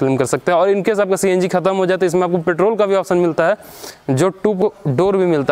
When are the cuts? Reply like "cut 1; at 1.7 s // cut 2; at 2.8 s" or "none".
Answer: cut 1; at 4.6 s